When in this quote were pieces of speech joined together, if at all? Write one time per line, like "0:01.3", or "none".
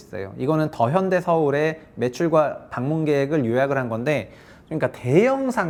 none